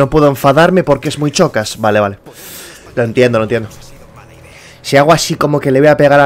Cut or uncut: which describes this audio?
uncut